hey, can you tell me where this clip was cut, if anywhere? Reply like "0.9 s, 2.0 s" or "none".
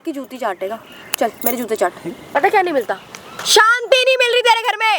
2.2 s